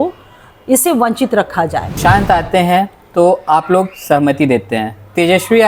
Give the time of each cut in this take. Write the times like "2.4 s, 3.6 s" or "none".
2.0 s